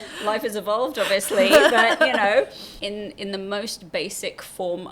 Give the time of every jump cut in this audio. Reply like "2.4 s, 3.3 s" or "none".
2.7 s